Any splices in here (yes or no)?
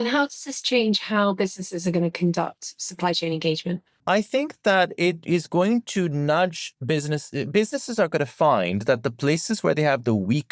no